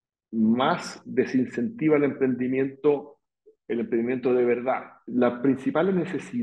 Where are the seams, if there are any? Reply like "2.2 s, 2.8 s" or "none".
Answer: 4.9 s